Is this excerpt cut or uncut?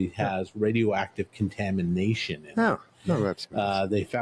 uncut